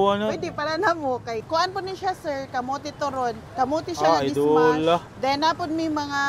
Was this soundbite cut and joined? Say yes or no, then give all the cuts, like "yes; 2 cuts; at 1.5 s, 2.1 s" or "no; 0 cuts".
yes; 3 cuts; at 1.4 s, 3.4 s, 5.1 s